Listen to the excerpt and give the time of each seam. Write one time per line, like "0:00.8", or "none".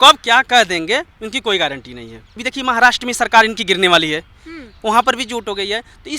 0:02.4